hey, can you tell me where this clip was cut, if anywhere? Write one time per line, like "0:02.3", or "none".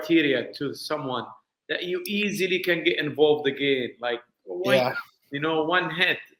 none